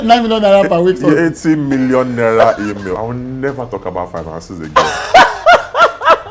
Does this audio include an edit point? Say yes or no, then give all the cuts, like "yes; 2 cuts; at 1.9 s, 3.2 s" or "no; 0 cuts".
yes; 1 cut; at 2.9 s